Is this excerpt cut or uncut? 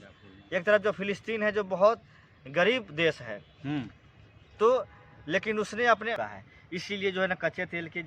cut